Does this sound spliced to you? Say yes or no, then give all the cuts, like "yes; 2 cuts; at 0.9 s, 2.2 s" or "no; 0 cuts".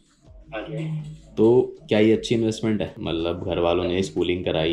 no; 0 cuts